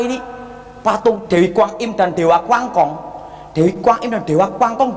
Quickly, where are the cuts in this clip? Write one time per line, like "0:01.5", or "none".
0:01.3